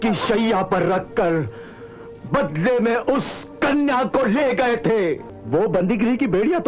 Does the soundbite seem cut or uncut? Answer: uncut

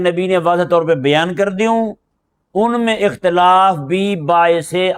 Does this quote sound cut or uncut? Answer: uncut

